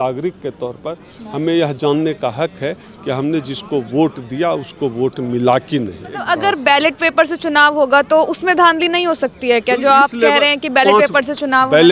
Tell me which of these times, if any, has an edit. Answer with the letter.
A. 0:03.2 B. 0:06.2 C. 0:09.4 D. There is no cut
B